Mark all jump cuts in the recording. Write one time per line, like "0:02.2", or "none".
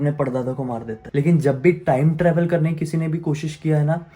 0:01.0